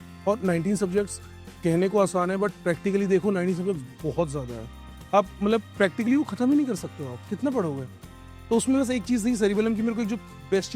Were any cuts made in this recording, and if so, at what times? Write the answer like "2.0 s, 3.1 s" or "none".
none